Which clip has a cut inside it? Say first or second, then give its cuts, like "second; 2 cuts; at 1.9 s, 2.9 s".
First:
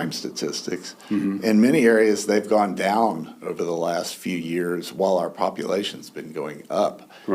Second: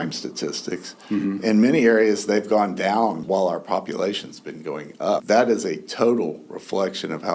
second; 2 cuts; at 3.2 s, 5.2 s